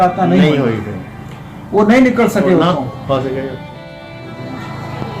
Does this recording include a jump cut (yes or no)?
yes